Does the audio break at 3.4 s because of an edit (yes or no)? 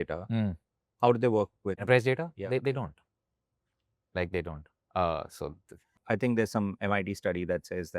no